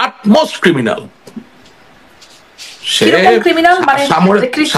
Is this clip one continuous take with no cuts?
yes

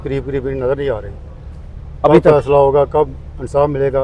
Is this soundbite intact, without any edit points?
yes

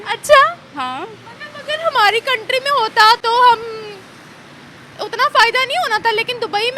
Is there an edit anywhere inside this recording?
no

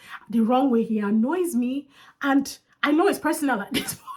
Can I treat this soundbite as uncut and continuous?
yes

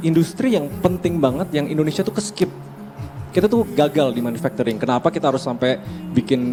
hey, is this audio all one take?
yes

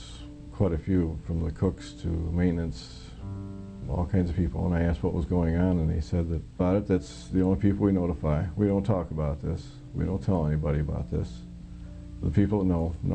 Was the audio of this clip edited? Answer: no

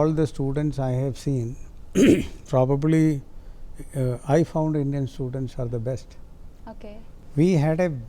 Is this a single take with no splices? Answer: no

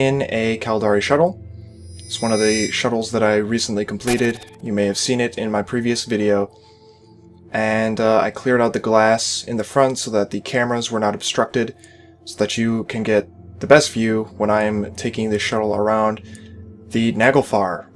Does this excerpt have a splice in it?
yes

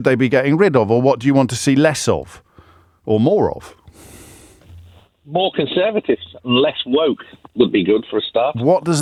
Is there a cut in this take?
no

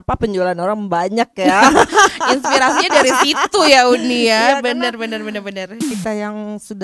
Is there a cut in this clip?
yes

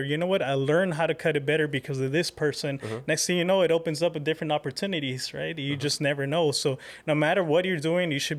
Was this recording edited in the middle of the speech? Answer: no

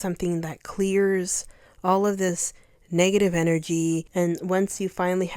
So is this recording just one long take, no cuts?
no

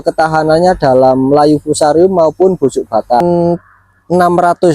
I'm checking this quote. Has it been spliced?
yes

